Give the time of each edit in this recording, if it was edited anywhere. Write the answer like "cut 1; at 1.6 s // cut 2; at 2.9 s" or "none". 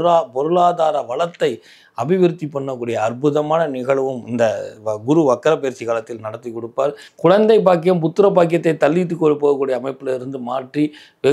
cut 1; at 7.1 s

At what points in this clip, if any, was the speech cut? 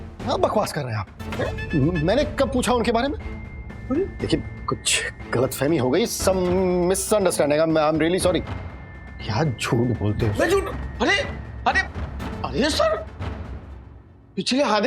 none

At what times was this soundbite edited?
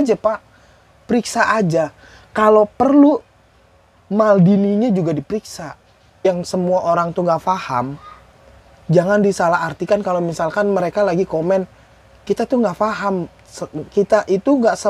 cut 1; at 6.2 s

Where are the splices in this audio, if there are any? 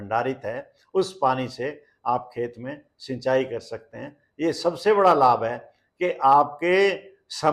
none

